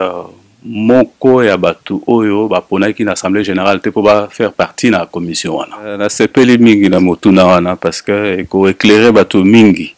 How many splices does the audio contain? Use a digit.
1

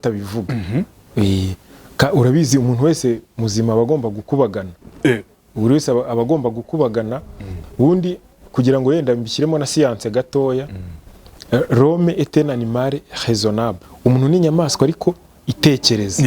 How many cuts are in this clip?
1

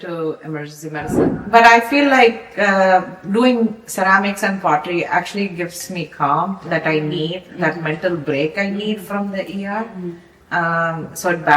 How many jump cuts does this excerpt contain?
1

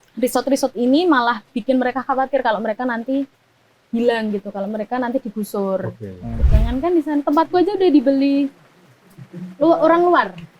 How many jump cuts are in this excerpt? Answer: 1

